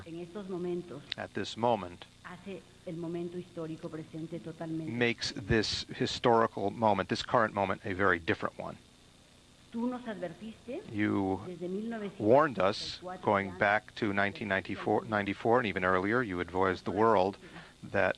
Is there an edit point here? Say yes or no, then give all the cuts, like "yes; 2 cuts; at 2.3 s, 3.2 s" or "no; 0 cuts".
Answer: yes; 1 cut; at 11.0 s